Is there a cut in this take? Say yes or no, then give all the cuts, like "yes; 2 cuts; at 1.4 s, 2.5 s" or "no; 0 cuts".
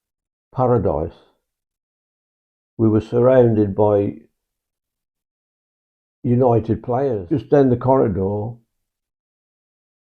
yes; 1 cut; at 7.2 s